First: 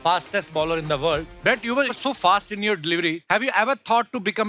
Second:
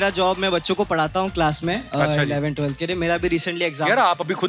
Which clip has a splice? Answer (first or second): first